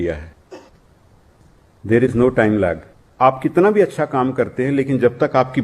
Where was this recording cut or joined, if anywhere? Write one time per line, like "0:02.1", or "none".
0:03.0